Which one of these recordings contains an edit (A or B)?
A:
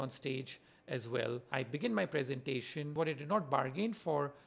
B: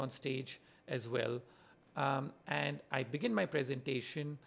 A